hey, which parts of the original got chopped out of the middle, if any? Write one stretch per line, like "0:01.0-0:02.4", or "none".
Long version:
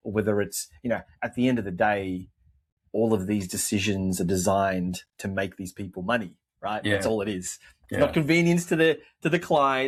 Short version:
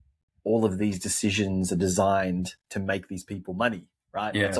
none